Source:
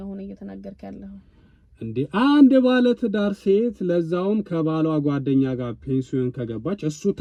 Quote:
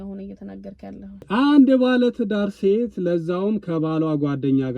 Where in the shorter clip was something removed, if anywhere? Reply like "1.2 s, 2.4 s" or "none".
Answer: 1.3 s